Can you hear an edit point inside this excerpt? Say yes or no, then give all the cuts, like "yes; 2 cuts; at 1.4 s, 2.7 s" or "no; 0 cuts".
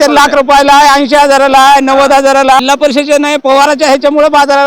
yes; 1 cut; at 2.6 s